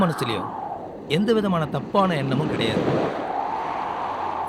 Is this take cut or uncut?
uncut